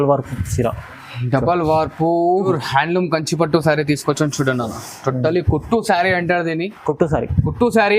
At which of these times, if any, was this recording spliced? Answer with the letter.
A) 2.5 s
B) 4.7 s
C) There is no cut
A